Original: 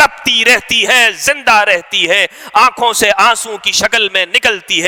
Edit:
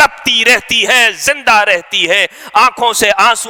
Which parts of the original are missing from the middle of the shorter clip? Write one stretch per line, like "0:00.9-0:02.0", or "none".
none